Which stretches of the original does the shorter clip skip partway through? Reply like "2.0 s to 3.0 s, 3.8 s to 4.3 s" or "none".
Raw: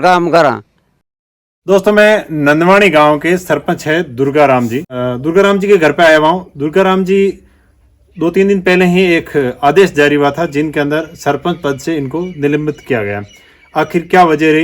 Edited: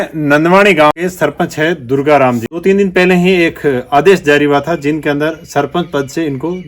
3.1 s to 3.2 s, 4.8 s to 8.2 s